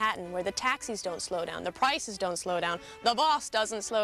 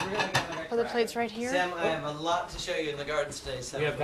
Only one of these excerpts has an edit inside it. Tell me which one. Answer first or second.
first